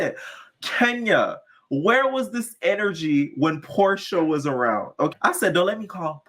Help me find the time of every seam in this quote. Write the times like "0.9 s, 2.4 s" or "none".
5.1 s